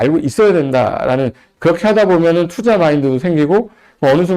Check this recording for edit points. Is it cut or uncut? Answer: cut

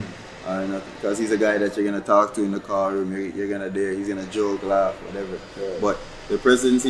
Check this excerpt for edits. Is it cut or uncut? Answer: uncut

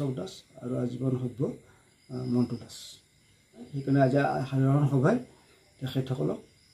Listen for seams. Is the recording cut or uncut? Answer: cut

